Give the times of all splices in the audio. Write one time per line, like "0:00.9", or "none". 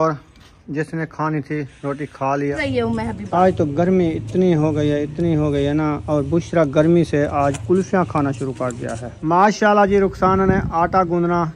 0:02.5
0:09.1